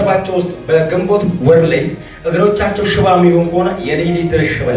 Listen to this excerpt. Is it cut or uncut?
cut